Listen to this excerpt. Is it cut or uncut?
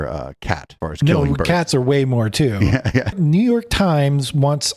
cut